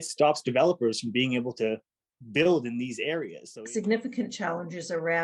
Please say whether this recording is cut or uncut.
cut